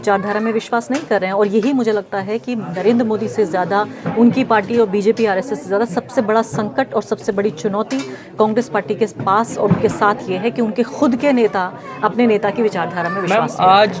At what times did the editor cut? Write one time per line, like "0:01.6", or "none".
none